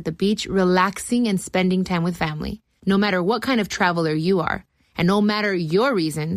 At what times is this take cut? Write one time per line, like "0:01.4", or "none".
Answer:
none